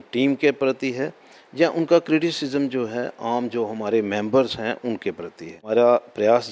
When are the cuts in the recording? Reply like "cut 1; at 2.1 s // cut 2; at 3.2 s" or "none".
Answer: cut 1; at 5.5 s

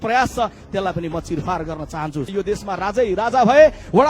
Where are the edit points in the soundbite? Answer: cut 1; at 2.3 s

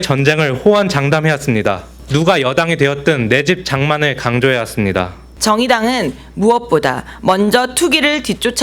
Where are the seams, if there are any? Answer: cut 1; at 1.9 s // cut 2; at 5.2 s

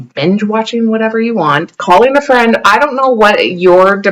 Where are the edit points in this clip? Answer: cut 1; at 1.7 s

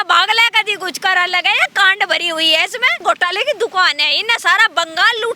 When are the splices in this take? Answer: cut 1; at 3.0 s

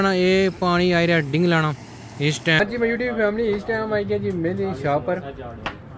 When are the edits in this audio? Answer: cut 1; at 2.6 s

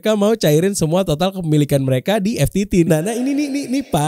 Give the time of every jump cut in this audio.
cut 1; at 2.9 s

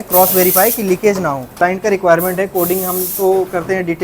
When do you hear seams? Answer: cut 1; at 1.6 s

